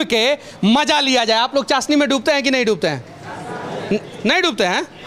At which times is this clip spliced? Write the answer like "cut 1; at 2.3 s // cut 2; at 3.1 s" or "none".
none

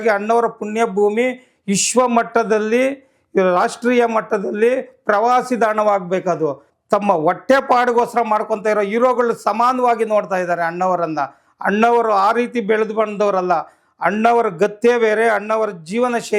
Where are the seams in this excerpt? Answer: cut 1; at 6.7 s

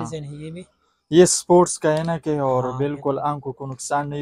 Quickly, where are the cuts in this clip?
none

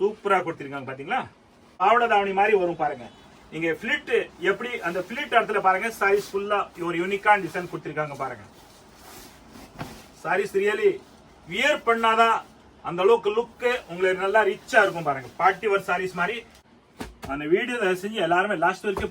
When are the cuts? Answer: cut 1; at 1.7 s // cut 2; at 16.5 s

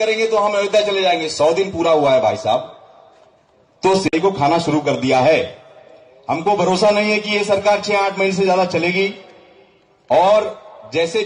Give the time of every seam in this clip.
cut 1; at 4.1 s

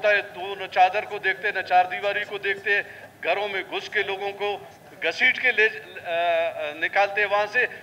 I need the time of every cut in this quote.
none

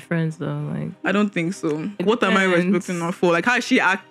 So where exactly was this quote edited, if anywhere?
cut 1; at 2.0 s

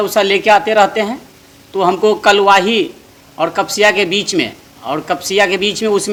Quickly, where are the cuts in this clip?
none

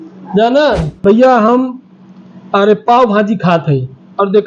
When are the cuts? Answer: cut 1; at 1.0 s

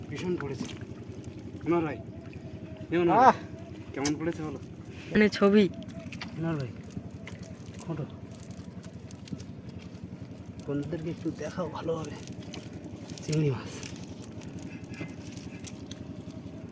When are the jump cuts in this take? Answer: cut 1; at 5.2 s

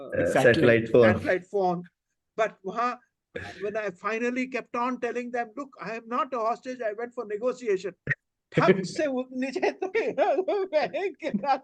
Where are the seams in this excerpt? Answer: none

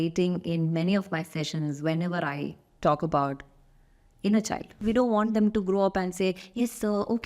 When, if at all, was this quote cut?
cut 1; at 4.8 s

